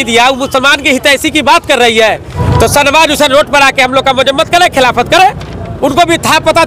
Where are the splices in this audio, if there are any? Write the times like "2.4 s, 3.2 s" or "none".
2.3 s